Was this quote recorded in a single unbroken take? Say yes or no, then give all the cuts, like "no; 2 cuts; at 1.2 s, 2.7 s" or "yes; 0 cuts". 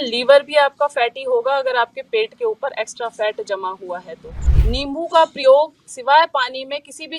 no; 1 cut; at 4.4 s